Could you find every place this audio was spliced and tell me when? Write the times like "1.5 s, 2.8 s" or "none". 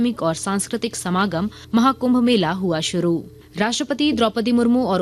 1.6 s